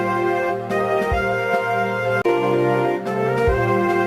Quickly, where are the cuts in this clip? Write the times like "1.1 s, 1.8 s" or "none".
2.2 s